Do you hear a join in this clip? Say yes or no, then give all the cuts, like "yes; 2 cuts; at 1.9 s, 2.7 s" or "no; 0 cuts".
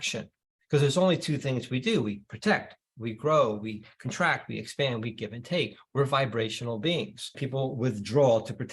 yes; 1 cut; at 7.4 s